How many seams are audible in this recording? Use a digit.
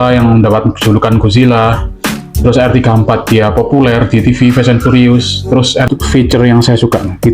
1